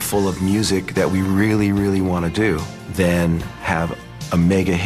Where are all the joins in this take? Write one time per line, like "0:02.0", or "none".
0:02.8
0:03.8